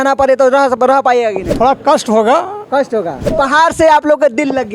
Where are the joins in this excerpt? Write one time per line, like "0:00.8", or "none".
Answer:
0:01.5
0:03.3

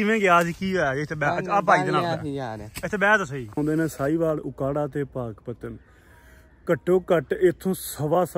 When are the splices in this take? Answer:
0:03.6

